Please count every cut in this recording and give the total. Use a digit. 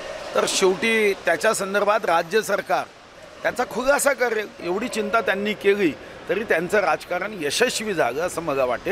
1